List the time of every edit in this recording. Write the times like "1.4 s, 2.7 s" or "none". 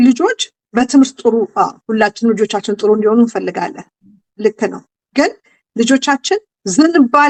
none